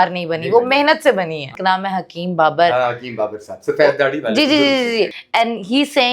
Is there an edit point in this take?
yes; 2 cuts; at 1.5 s, 5.2 s

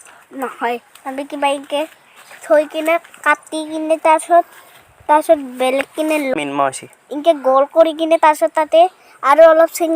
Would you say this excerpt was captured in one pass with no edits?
no; 1 cut; at 6.4 s

